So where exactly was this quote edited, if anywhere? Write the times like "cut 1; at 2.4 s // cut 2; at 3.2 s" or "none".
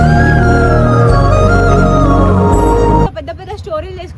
cut 1; at 3.1 s